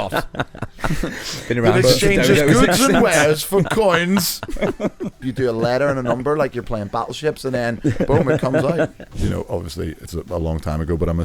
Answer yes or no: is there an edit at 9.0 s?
yes